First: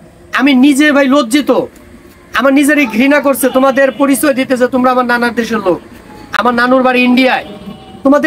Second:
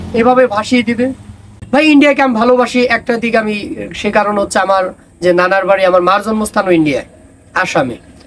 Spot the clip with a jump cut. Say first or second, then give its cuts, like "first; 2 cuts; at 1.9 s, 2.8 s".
second; 1 cut; at 1.5 s